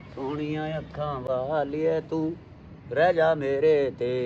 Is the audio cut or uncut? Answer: uncut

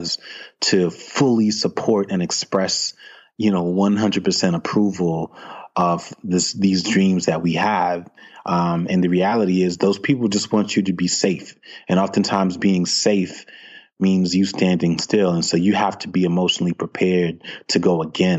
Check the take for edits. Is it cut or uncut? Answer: uncut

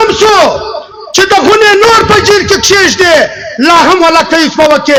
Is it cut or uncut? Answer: uncut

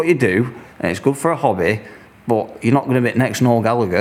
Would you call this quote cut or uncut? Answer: uncut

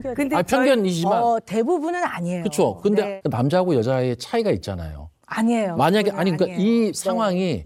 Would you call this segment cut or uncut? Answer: uncut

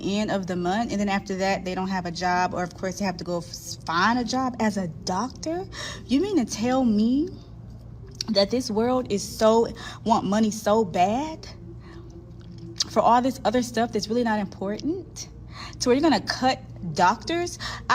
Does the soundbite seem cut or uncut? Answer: uncut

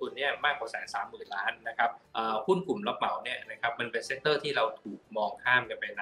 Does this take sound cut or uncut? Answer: cut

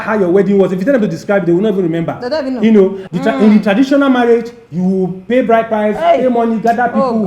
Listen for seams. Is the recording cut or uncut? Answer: cut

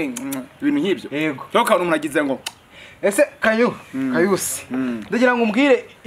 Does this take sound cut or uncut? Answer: uncut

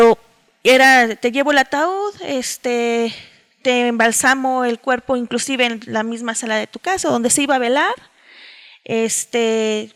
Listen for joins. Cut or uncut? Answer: uncut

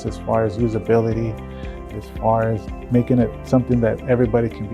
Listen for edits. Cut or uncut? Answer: cut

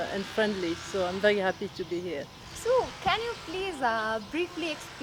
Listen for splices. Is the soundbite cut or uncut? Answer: uncut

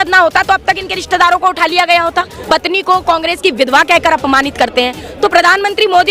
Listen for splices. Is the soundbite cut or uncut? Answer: cut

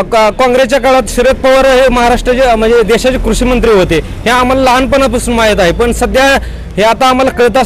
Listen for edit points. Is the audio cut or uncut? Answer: uncut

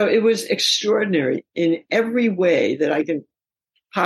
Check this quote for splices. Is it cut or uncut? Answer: cut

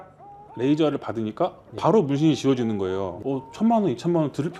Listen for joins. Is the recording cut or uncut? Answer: uncut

